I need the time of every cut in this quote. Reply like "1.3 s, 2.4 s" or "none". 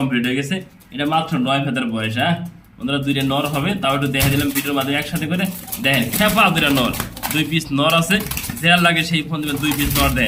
none